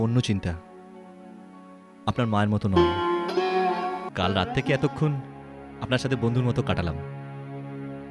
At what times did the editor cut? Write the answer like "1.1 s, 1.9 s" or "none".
4.0 s